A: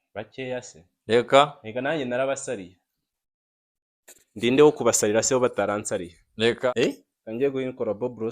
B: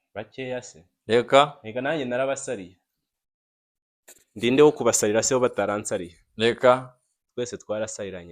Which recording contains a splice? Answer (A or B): A